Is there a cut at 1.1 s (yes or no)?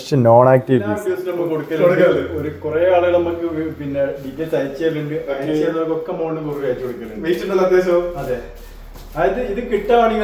yes